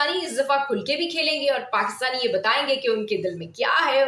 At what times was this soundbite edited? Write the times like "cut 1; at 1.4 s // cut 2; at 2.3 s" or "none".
none

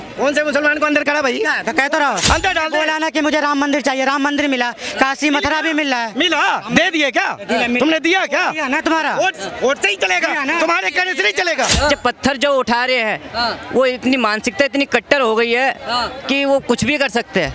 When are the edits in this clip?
cut 1; at 2.2 s // cut 2; at 11.7 s

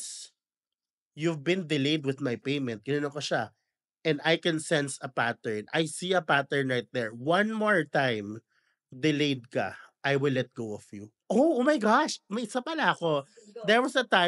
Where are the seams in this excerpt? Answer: cut 1; at 11.1 s

